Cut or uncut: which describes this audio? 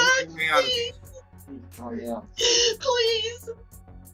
uncut